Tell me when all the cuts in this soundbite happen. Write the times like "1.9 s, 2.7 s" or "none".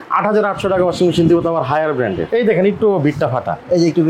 2.2 s